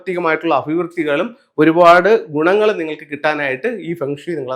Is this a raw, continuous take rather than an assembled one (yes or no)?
yes